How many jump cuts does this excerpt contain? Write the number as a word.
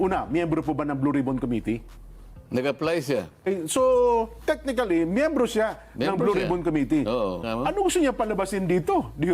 two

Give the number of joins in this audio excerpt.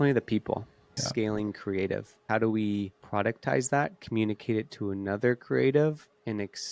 three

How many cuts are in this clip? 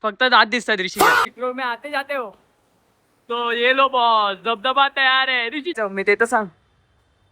two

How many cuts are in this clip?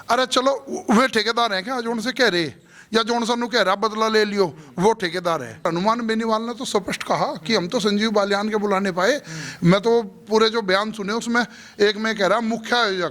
one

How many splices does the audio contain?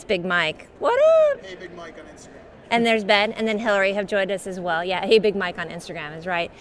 one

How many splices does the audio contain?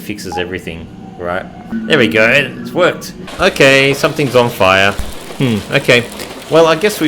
two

